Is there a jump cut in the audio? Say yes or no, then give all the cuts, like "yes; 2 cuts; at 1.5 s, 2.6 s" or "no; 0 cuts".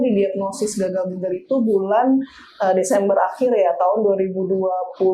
no; 0 cuts